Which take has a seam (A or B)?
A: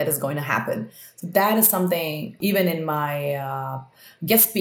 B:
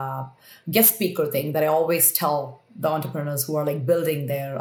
A